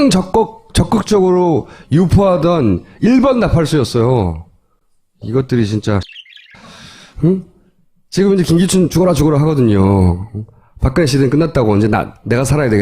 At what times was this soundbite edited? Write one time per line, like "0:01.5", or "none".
0:11.8

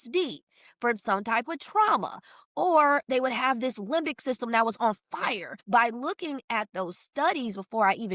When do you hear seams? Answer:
0:05.6

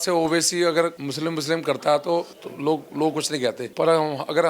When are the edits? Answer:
0:01.0
0:02.4
0:03.6

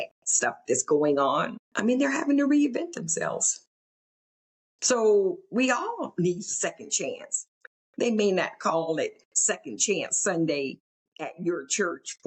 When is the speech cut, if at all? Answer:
0:01.6

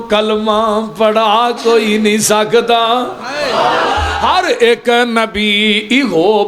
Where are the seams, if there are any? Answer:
0:04.1

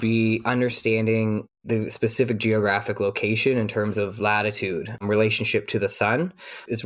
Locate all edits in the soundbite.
none

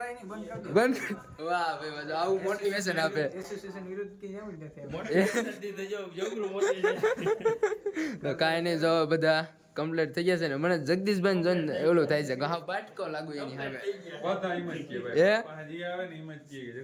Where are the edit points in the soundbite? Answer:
none

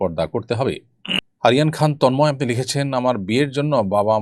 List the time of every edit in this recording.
0:01.0

